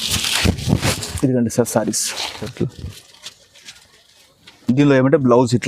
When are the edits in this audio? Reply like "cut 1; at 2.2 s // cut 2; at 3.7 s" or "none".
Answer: cut 1; at 2.5 s